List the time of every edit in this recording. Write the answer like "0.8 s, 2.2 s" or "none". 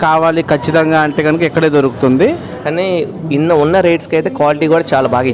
2.5 s